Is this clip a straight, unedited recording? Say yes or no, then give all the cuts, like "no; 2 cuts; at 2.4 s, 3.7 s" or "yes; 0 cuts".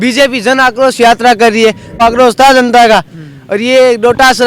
no; 1 cut; at 2.0 s